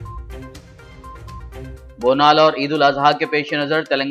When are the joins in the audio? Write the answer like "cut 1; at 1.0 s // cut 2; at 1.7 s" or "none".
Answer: cut 1; at 1.7 s

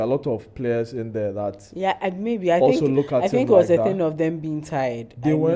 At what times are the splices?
none

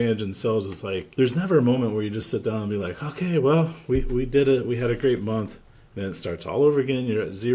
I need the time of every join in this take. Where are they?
cut 1; at 1.0 s

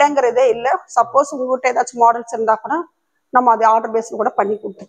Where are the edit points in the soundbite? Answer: none

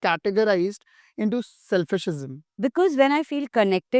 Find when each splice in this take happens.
cut 1; at 2.4 s

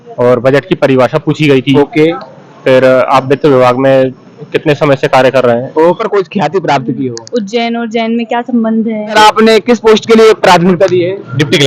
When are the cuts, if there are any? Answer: cut 1; at 6.0 s // cut 2; at 9.2 s

